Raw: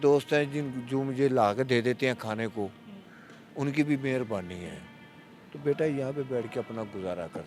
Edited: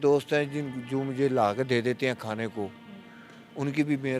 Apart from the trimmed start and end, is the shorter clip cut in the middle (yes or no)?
no